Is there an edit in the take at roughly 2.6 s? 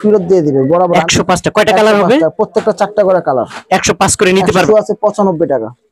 no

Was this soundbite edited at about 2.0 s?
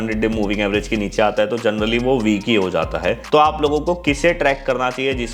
no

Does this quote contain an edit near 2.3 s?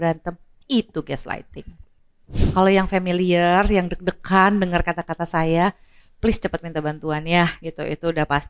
yes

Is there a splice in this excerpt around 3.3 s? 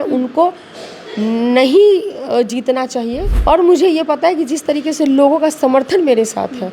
yes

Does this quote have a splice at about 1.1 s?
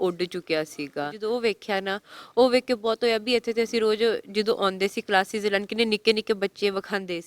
yes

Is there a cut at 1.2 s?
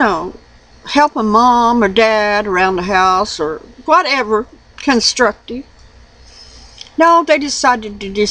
yes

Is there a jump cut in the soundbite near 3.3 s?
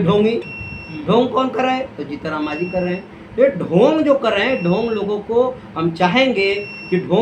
no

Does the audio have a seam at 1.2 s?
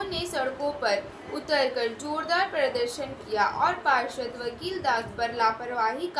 no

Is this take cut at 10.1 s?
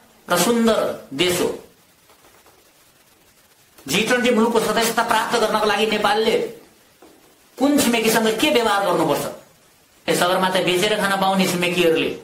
yes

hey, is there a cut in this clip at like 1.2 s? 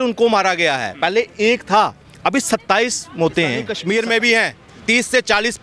no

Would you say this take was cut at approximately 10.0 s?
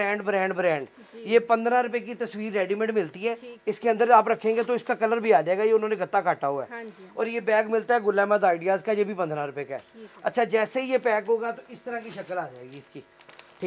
no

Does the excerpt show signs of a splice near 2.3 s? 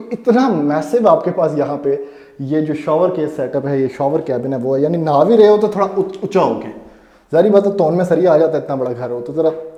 no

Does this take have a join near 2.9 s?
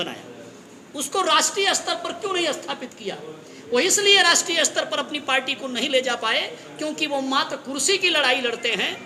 no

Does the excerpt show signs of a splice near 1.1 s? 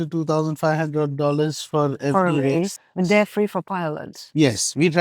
no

